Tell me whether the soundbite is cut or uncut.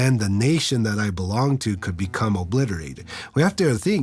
uncut